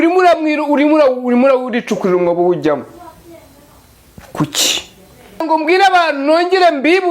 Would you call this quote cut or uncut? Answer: cut